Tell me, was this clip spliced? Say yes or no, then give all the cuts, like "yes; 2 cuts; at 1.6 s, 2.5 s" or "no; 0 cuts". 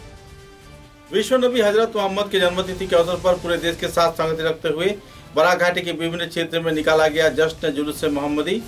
no; 0 cuts